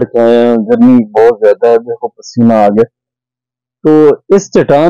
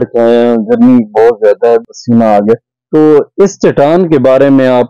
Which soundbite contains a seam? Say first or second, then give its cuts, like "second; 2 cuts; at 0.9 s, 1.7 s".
second; 2 cuts; at 1.9 s, 2.7 s